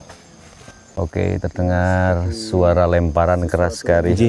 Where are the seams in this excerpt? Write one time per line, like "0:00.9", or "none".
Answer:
0:01.4